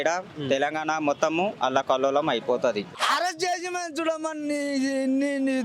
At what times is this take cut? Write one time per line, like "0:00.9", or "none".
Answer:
0:02.9